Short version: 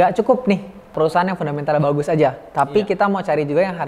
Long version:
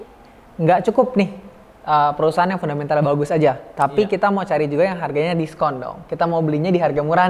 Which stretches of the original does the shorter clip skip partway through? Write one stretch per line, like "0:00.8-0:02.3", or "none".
0:01.6-0:02.2